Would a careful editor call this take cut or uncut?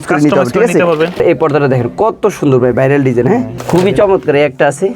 cut